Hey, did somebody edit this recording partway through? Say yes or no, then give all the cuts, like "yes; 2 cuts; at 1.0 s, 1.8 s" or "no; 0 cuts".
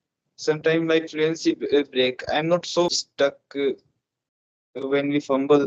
no; 0 cuts